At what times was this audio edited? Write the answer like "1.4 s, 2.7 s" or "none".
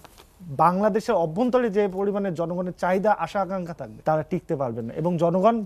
3.8 s